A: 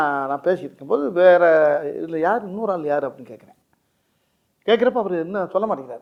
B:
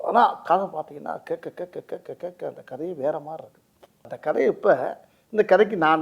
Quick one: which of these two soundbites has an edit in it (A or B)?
B